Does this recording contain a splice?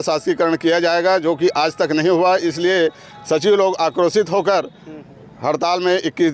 no; 0 cuts

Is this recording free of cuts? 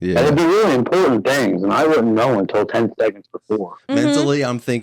no; 1 cut; at 3.8 s

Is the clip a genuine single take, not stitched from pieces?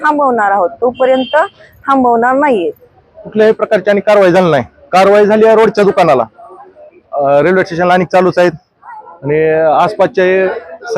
no; 1 cut; at 2.7 s

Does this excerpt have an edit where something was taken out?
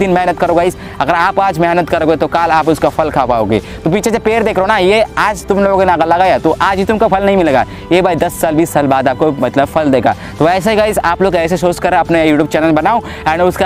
no; 0 cuts

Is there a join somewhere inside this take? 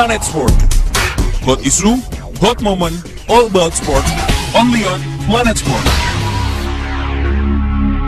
no; 0 cuts

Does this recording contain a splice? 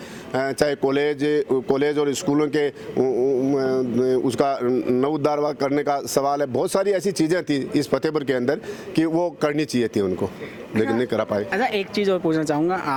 no; 0 cuts

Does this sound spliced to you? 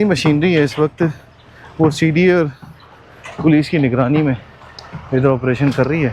no; 0 cuts

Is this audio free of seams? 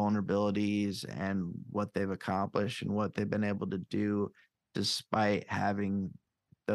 yes; 0 cuts

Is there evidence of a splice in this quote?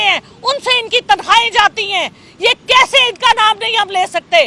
no; 0 cuts

